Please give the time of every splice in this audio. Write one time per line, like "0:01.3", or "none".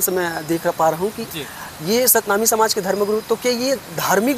none